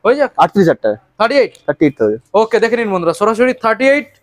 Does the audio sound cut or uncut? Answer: uncut